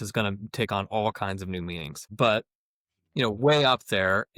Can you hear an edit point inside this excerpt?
yes; 1 cut; at 2.1 s

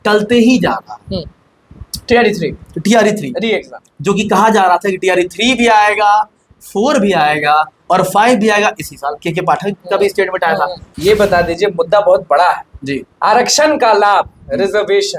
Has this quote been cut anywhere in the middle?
yes; 1 cut; at 10.8 s

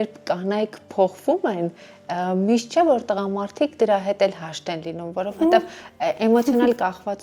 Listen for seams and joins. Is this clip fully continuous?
yes; 0 cuts

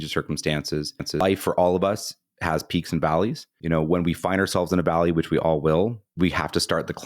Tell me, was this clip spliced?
yes; 3 cuts; at 1.2 s, 3.5 s, 6.0 s

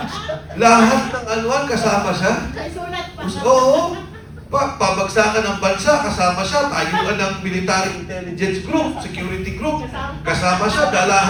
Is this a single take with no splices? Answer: yes; 0 cuts

